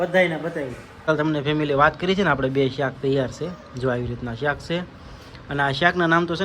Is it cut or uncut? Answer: cut